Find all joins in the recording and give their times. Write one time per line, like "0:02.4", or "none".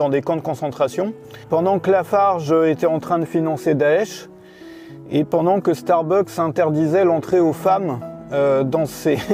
none